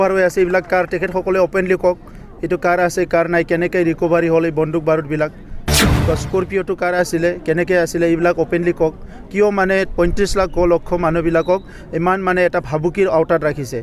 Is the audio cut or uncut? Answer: uncut